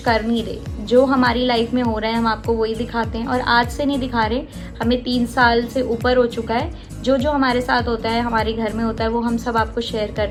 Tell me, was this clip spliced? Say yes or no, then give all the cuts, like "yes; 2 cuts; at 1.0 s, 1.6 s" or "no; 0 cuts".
no; 0 cuts